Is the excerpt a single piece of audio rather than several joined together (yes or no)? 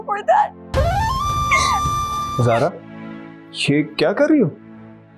no